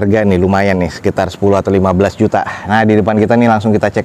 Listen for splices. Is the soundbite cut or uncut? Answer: uncut